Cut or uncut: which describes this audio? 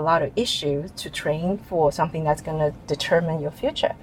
uncut